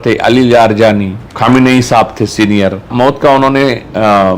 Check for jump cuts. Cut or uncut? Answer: cut